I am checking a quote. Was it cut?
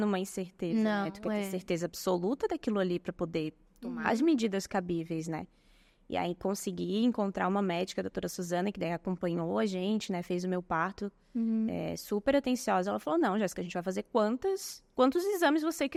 no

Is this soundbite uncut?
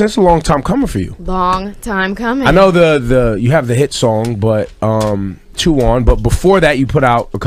yes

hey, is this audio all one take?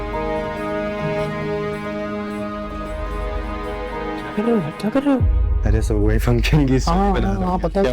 no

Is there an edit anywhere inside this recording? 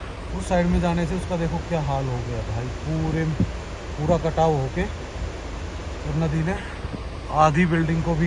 no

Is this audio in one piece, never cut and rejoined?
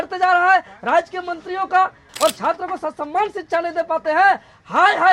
no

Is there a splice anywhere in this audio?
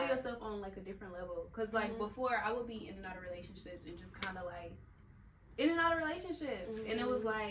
no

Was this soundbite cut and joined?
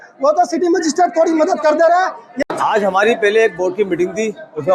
yes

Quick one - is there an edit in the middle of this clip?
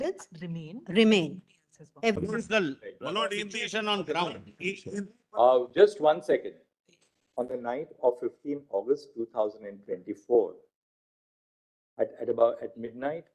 yes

